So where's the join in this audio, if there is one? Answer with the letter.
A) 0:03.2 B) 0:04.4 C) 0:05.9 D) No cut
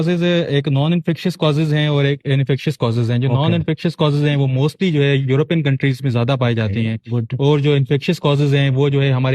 D